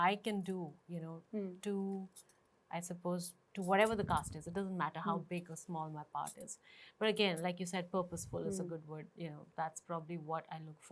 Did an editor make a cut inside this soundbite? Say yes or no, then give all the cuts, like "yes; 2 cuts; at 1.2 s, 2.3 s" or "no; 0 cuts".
no; 0 cuts